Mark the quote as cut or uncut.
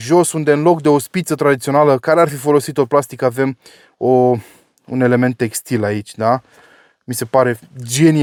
uncut